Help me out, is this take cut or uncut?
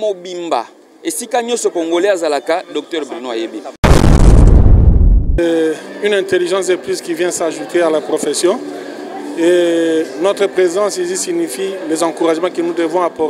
cut